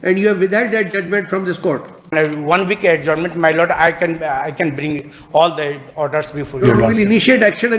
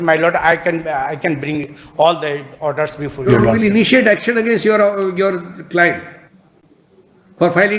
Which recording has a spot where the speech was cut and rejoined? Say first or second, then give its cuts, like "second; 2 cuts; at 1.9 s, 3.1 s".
first; 1 cut; at 2.1 s